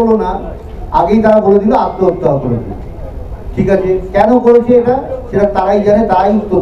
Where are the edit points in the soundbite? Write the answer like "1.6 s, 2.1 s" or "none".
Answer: none